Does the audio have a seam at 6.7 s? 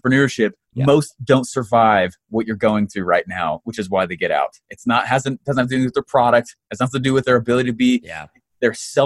no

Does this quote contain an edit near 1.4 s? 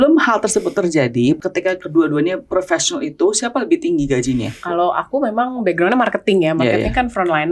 yes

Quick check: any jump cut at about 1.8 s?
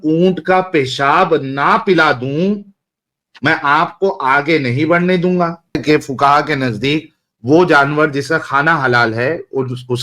no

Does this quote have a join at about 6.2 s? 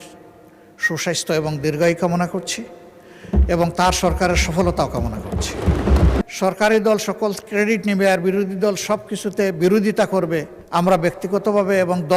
yes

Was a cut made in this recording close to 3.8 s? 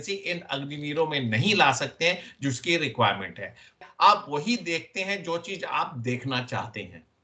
yes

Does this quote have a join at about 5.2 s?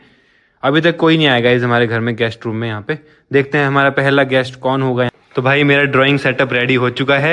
yes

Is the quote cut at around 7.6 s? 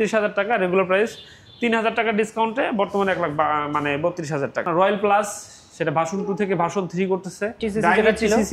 yes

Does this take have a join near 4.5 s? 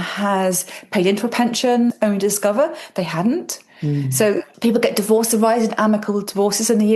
yes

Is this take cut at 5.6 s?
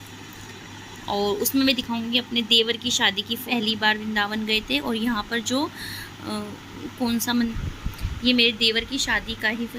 no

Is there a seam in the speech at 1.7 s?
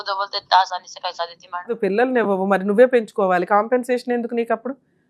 yes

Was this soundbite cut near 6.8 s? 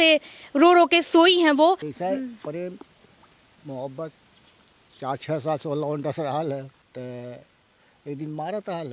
yes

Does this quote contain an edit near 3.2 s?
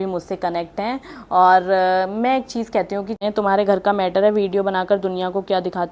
yes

